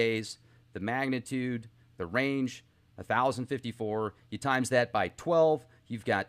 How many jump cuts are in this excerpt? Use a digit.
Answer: 1